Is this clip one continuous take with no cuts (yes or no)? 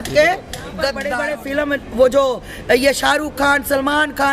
no